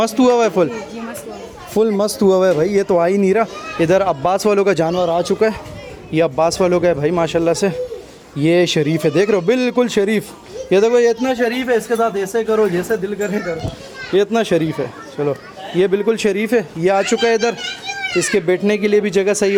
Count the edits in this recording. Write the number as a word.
zero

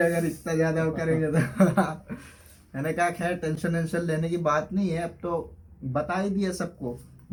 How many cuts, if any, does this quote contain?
zero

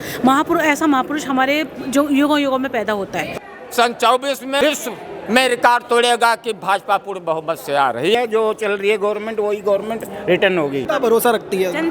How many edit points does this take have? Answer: four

